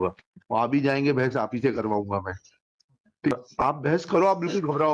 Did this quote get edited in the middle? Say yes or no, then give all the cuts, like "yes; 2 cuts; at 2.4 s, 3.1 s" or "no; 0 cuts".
yes; 1 cut; at 3.3 s